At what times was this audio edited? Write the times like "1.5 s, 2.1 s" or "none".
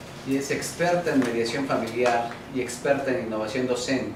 none